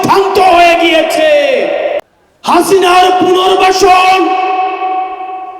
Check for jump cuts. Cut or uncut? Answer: cut